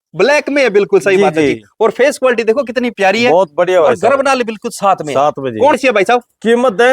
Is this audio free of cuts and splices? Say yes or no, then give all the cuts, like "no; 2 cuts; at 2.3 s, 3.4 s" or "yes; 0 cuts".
no; 1 cut; at 5.8 s